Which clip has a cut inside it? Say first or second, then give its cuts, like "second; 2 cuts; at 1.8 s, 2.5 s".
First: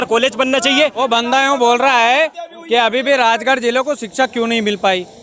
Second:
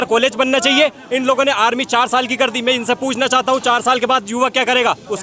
first; 1 cut; at 1.0 s